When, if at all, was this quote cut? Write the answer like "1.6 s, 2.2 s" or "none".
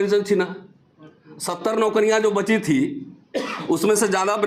none